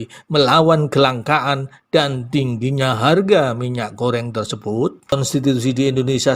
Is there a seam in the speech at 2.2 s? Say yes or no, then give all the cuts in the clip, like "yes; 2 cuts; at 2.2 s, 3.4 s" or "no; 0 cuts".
no; 1 cut; at 5.1 s